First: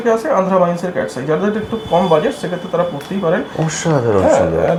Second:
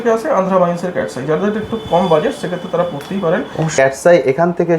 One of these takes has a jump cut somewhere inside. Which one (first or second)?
second